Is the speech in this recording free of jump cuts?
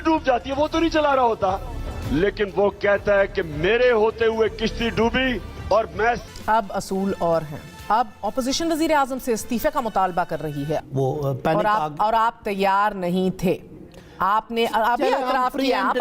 no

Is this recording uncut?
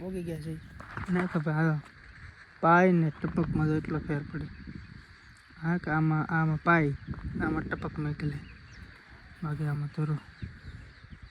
yes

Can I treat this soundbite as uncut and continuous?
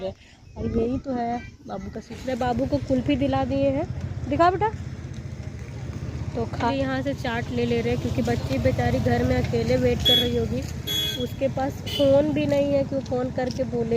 no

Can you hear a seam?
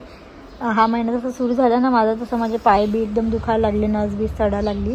no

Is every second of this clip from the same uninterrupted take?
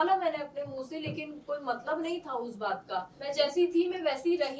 no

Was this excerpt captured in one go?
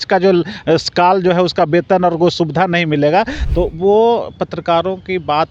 no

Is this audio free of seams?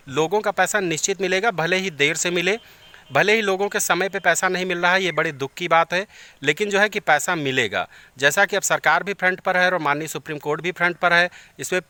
yes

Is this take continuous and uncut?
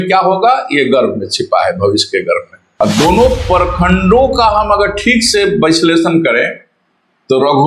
no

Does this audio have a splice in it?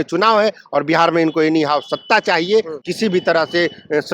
yes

